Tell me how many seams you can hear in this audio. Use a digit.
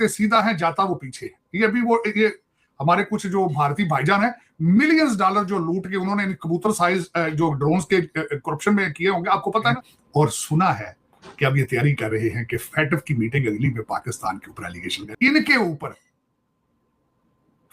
2